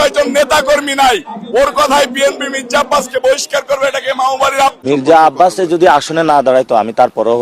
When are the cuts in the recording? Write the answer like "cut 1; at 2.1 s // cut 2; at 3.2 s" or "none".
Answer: cut 1; at 4.8 s